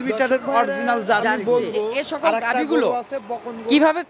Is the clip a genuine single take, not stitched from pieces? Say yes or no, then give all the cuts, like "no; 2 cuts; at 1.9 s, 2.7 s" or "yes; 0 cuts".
no; 1 cut; at 1.4 s